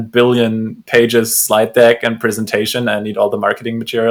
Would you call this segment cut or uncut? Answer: uncut